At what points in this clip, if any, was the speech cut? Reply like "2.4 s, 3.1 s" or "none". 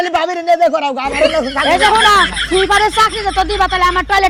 none